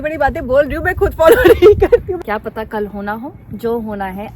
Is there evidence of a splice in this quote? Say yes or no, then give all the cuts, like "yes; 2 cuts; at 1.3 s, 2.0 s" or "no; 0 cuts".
yes; 1 cut; at 2.1 s